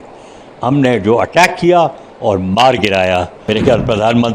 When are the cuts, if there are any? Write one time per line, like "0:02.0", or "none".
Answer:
0:03.4